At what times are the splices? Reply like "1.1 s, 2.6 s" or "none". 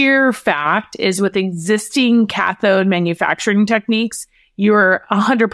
none